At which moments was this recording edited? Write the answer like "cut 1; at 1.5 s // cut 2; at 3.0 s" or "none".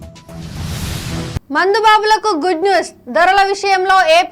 cut 1; at 1.4 s